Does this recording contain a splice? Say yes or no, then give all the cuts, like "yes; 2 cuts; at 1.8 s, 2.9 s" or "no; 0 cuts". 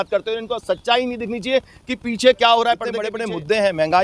yes; 1 cut; at 3.1 s